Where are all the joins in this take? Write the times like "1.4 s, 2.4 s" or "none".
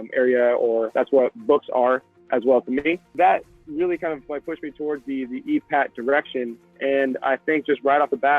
0.9 s, 3.1 s